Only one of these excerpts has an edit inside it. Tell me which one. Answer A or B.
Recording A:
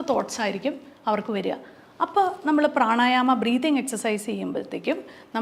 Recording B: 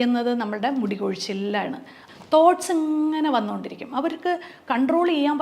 B